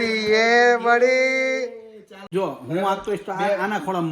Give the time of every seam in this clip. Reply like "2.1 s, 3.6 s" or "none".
2.3 s